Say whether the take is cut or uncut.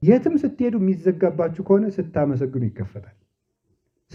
uncut